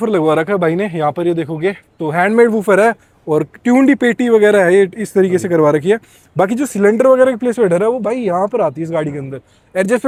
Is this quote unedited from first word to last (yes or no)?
yes